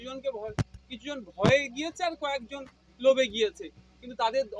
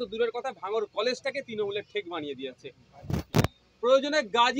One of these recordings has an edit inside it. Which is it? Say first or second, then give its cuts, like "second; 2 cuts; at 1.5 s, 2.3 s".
second; 1 cut; at 3.3 s